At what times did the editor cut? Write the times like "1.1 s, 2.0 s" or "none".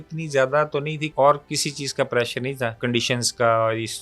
1.1 s, 2.8 s